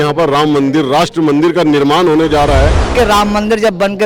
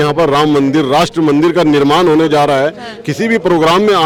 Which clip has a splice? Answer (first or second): first